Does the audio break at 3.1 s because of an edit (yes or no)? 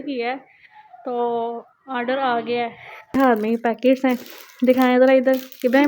yes